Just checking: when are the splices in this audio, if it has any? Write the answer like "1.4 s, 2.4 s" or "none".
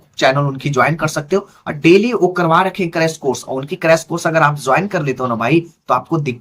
none